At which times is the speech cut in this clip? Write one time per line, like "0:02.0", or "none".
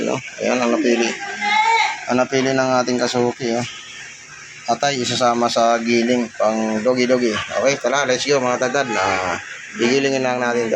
none